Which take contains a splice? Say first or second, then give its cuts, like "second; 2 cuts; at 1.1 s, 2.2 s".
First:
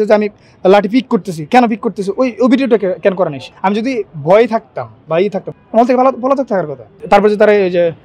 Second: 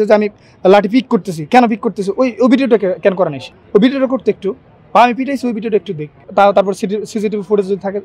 first; 3 cuts; at 3.5 s, 5.5 s, 6.9 s